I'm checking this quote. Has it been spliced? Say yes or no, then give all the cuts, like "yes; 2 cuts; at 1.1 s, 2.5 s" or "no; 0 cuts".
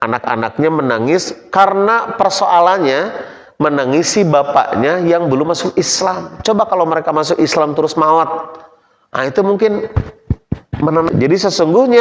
yes; 1 cut; at 11.1 s